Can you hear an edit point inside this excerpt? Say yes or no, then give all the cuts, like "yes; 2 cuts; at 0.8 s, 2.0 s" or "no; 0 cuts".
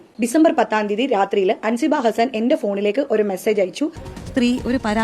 yes; 1 cut; at 4.1 s